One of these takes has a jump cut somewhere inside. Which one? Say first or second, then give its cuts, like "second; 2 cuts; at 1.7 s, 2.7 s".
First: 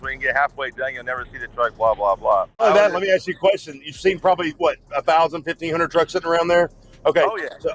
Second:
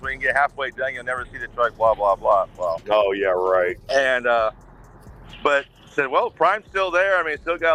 first; 1 cut; at 2.6 s